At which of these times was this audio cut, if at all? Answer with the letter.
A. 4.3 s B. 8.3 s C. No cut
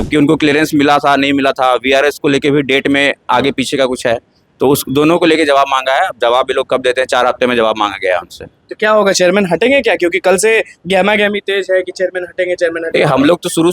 C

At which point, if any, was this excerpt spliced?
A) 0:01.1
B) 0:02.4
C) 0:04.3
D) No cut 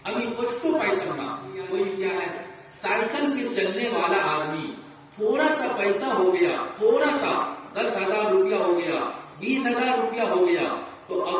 B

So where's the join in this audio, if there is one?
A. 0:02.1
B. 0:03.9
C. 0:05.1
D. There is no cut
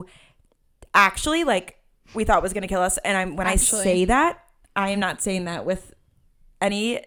D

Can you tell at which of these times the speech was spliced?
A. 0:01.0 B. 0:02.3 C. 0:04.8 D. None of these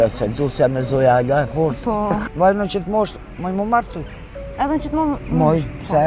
B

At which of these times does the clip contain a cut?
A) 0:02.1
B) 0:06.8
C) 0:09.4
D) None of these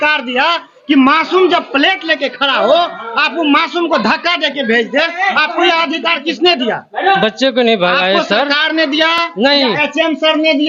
D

